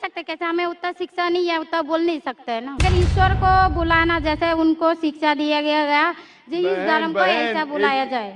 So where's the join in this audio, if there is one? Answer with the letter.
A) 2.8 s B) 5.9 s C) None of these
A